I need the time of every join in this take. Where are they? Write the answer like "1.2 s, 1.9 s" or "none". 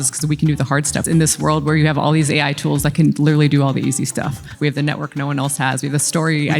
1.0 s, 4.5 s